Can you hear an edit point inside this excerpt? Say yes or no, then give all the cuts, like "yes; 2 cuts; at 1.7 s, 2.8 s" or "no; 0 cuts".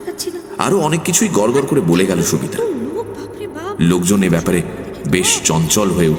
no; 0 cuts